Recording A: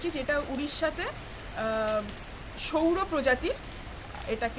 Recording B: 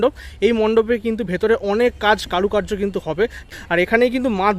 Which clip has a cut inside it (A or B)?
B